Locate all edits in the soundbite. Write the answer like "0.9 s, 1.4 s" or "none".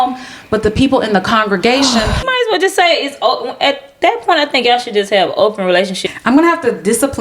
2.2 s, 6.0 s